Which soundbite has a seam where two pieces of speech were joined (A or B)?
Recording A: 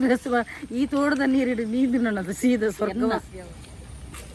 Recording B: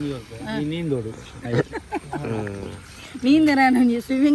A